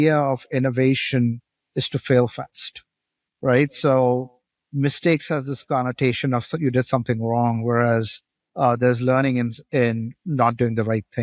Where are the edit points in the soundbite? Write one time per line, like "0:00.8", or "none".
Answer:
none